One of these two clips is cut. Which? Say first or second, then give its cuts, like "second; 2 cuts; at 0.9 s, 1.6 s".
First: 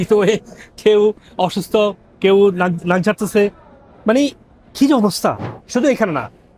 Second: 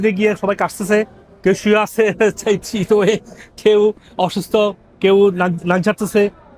first; 1 cut; at 5.5 s